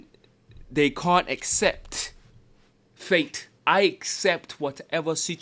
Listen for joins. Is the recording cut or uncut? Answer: cut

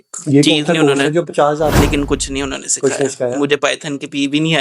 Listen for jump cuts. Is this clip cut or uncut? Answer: cut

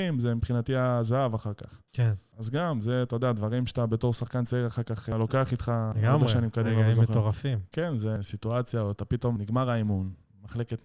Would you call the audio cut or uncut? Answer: cut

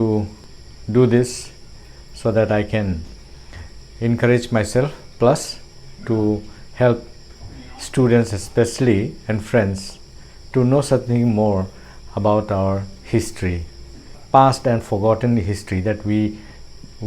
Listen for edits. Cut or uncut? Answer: cut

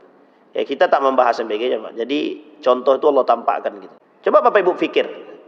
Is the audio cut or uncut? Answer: cut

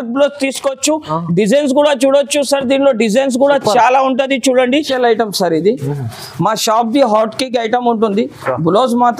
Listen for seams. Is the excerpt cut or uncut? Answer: cut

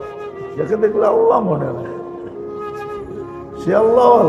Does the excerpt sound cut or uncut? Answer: uncut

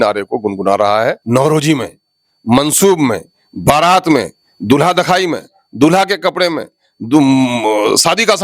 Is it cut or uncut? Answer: cut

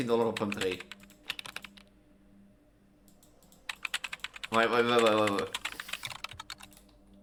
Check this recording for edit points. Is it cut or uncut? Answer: uncut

